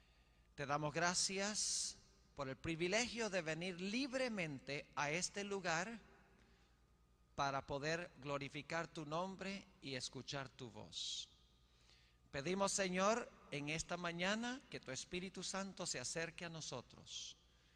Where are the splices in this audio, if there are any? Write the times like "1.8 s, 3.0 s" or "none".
3.7 s